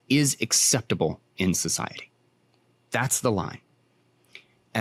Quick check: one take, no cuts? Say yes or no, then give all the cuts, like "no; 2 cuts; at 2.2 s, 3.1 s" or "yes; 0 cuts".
yes; 0 cuts